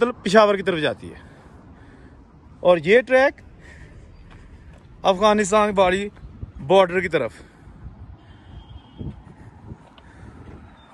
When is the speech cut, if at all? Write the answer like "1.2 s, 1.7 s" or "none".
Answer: none